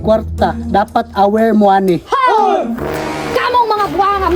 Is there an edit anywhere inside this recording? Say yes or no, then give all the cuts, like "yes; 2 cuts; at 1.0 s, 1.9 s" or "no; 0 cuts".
no; 0 cuts